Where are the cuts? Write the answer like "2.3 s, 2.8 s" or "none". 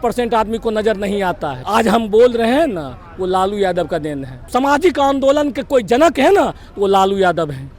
1.5 s, 4.4 s